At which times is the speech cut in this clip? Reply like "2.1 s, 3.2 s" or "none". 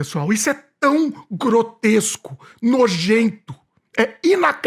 none